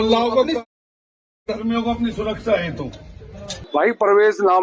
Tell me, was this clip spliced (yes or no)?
yes